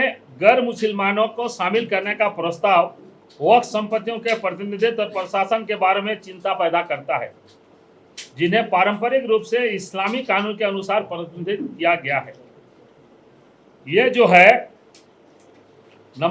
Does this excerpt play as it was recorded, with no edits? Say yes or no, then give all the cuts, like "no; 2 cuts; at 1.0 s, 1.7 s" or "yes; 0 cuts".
yes; 0 cuts